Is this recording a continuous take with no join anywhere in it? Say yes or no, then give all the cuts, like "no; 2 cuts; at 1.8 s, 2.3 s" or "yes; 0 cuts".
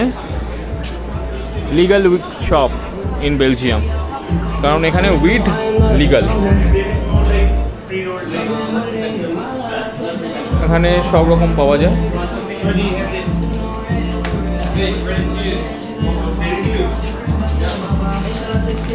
yes; 0 cuts